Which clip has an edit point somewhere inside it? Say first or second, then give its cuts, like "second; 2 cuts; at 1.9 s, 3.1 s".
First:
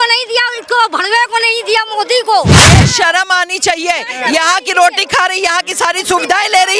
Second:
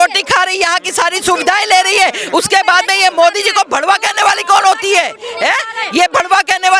first; 1 cut; at 2.7 s